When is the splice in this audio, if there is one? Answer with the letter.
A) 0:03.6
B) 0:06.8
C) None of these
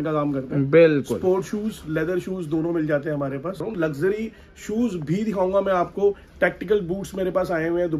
A